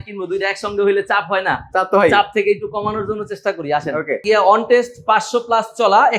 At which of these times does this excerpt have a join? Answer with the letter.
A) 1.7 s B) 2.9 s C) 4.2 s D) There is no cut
C